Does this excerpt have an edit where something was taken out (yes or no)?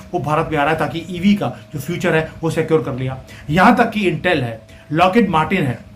no